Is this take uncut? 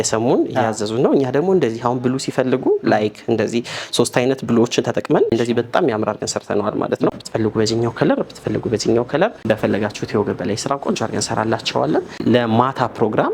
no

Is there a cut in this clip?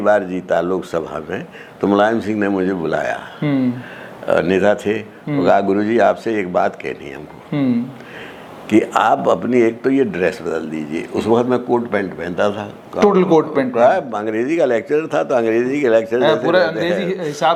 no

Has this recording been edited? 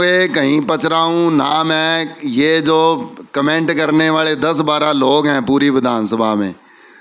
no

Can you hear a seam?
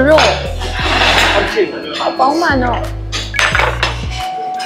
no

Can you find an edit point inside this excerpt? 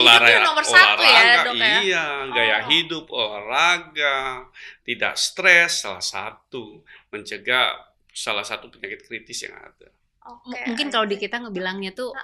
no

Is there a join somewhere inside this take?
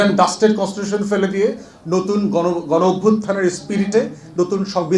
no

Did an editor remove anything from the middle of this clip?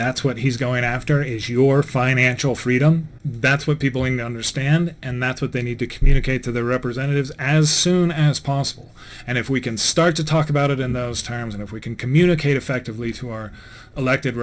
yes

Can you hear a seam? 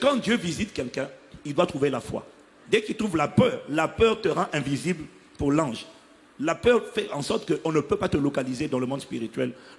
no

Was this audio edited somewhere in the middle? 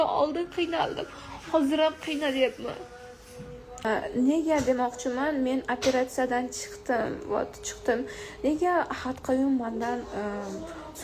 yes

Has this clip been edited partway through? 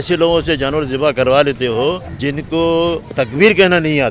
yes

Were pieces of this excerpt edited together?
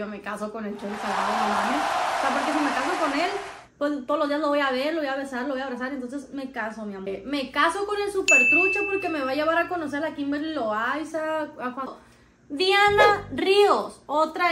yes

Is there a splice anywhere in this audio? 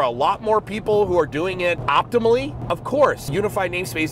yes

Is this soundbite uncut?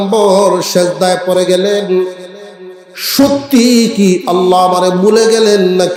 yes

